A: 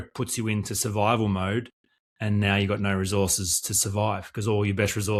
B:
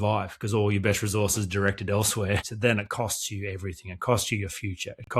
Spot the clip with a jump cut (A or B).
B